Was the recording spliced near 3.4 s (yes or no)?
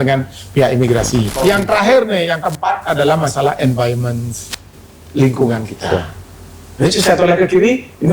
no